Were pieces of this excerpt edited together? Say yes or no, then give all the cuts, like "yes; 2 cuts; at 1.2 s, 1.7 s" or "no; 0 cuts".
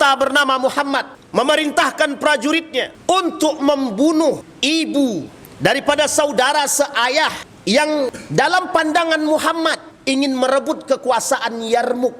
yes; 7 cuts; at 1.2 s, 2.9 s, 4.5 s, 5.4 s, 7.5 s, 8.2 s, 9.9 s